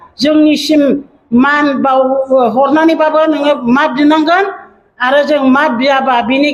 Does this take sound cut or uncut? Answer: uncut